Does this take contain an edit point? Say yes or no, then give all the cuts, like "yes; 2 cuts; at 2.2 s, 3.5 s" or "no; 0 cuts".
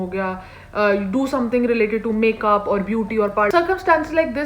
yes; 1 cut; at 3.5 s